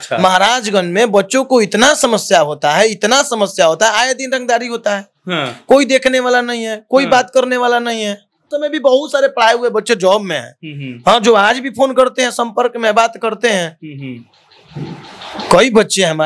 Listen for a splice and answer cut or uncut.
cut